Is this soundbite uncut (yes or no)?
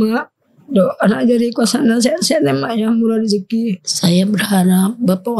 no